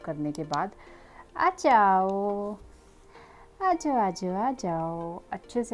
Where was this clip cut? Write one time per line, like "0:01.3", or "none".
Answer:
none